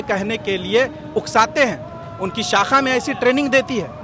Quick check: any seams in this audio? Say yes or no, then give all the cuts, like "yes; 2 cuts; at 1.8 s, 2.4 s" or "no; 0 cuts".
no; 0 cuts